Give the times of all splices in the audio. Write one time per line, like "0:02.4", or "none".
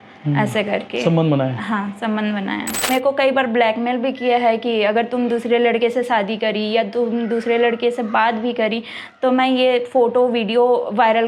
0:02.8